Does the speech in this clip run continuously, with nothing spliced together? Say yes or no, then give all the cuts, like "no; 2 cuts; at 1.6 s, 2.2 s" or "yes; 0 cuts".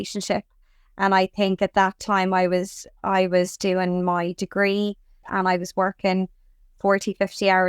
no; 1 cut; at 5.2 s